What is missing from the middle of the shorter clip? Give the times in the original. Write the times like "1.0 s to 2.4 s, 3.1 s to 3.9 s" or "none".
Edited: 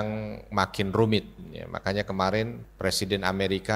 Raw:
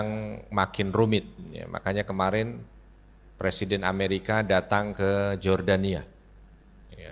2.6 s to 3.2 s